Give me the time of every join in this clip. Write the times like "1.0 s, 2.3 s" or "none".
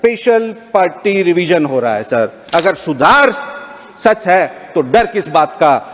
2.4 s